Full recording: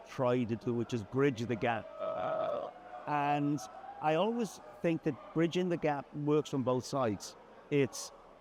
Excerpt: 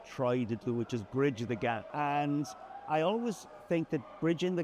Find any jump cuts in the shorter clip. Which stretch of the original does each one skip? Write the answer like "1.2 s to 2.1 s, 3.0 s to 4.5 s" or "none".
1.9 s to 3.0 s